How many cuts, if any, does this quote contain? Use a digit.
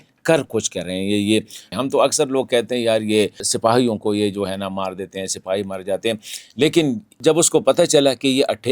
3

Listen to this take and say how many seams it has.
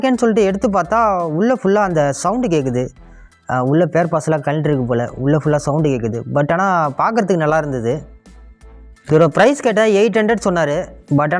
0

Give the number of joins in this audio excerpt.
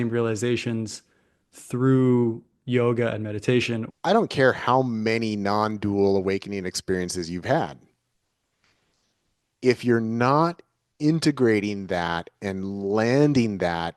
1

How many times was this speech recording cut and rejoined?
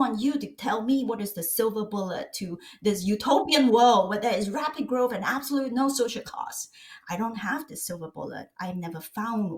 0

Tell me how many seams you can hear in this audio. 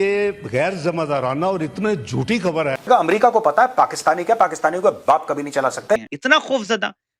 2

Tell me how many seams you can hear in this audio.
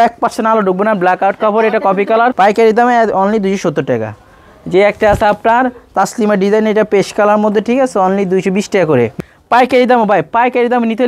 2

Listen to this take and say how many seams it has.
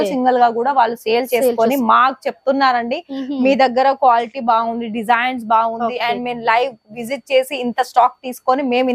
0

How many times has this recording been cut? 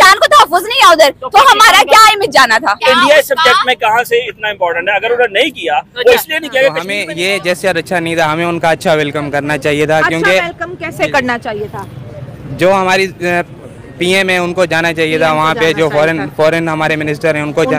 1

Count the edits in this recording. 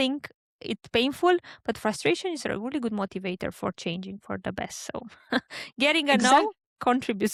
0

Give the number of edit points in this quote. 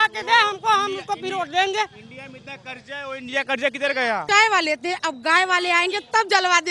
1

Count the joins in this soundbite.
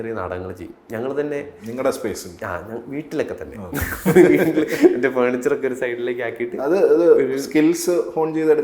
0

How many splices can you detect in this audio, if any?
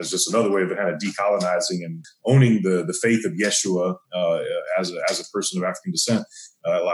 1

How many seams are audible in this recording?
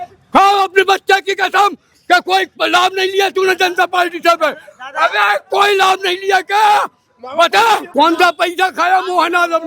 1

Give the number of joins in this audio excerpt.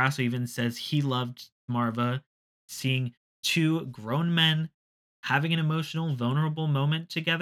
2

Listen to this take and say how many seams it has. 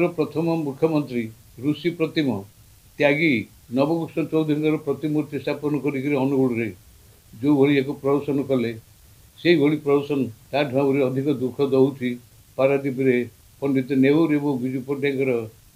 3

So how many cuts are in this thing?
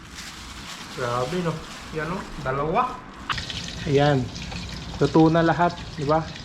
1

